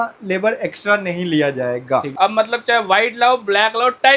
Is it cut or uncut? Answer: cut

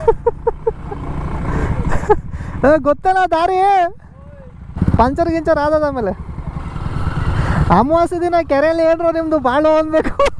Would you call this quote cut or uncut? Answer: cut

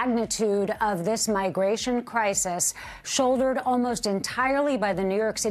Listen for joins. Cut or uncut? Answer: uncut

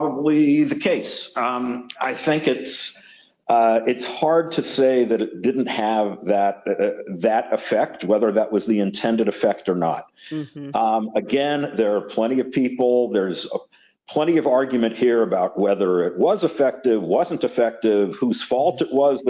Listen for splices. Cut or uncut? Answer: uncut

